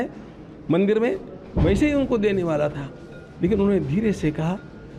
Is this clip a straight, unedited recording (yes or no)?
yes